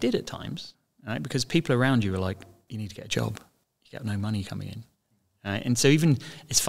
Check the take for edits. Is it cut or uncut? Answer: cut